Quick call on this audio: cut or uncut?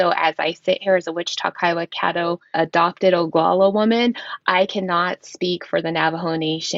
uncut